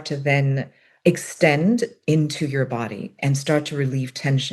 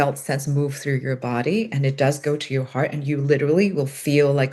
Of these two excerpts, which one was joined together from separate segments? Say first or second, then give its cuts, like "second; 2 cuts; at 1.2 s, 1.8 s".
first; 1 cut; at 1.0 s